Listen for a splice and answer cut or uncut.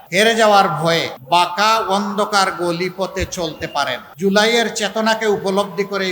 cut